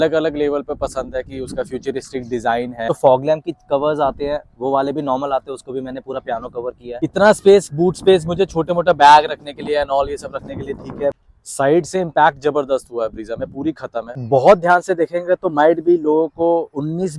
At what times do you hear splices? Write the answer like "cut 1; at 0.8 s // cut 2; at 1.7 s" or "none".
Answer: cut 1; at 2.9 s // cut 2; at 7.0 s // cut 3; at 11.2 s // cut 4; at 14.2 s